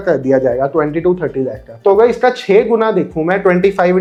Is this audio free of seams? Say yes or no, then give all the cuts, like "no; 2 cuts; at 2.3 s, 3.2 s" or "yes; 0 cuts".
yes; 0 cuts